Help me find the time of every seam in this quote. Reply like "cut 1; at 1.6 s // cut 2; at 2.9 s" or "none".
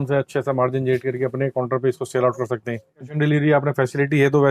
cut 1; at 3.1 s